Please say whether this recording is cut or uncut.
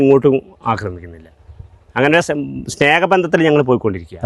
uncut